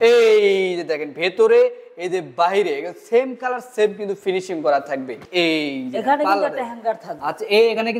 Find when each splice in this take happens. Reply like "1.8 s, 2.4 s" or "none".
5.2 s